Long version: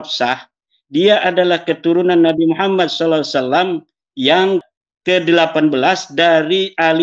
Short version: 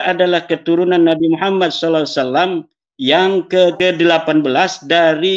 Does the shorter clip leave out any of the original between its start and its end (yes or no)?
yes